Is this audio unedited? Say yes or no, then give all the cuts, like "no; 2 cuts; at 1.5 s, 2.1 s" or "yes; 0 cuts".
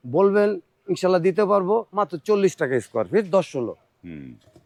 yes; 0 cuts